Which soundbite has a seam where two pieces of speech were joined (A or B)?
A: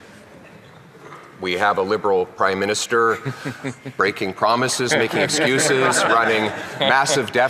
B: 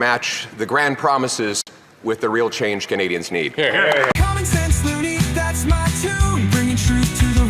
B